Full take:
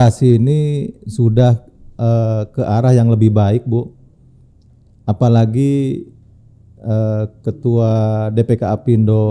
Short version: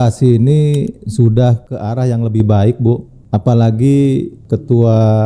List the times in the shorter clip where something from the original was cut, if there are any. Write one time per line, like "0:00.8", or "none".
0:01.7
0:03.1
0:04.4